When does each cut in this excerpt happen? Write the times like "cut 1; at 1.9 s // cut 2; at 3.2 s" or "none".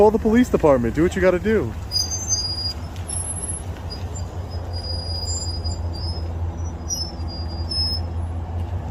none